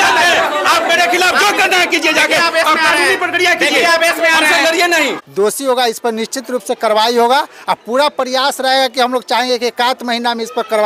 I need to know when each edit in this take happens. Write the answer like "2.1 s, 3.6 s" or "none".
5.2 s